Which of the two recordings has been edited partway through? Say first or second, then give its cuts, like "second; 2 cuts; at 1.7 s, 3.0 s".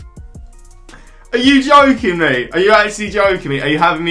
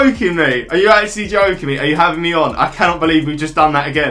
first; 1 cut; at 0.9 s